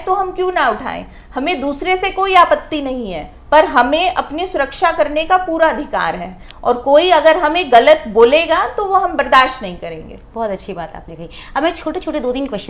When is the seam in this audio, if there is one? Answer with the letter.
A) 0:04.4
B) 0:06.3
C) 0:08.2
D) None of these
D